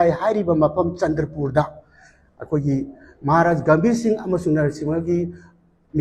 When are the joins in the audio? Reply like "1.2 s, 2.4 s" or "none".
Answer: none